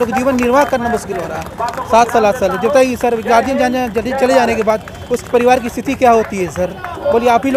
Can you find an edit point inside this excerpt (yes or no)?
no